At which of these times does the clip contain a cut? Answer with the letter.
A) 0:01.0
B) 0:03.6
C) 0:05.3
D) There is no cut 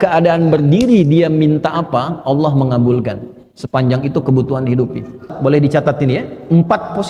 C